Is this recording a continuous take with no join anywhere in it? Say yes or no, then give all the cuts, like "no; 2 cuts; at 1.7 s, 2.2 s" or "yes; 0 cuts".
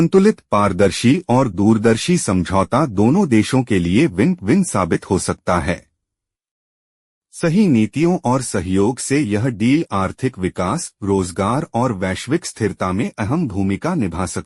yes; 0 cuts